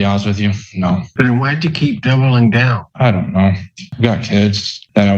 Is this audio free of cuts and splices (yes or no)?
no